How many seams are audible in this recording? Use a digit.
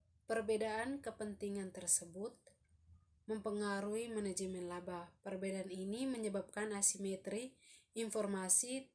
0